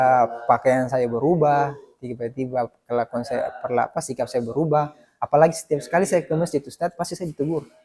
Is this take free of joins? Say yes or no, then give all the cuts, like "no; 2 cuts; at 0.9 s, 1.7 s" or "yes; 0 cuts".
yes; 0 cuts